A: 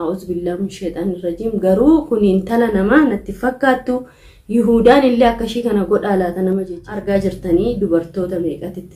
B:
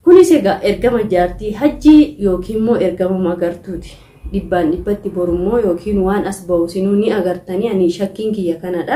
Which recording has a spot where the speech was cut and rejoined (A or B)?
A